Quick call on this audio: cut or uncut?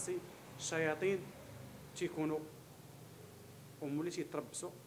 uncut